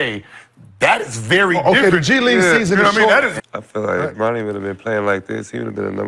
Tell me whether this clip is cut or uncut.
cut